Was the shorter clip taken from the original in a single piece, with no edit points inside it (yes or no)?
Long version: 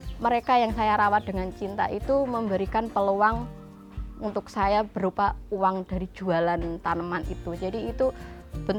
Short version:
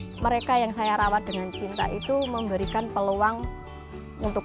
yes